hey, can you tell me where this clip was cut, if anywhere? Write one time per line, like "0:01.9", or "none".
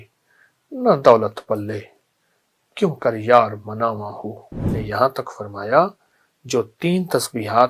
0:04.8